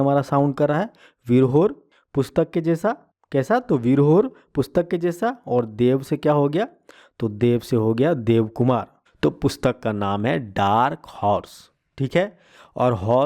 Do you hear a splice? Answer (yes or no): yes